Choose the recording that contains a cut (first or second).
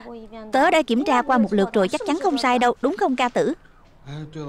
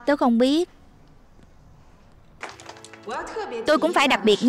second